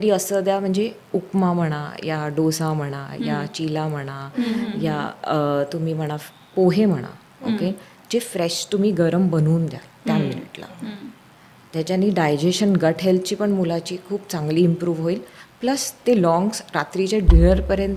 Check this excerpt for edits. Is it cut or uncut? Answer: uncut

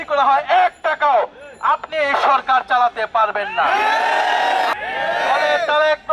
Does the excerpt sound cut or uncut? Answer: cut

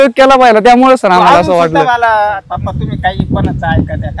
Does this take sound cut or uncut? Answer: cut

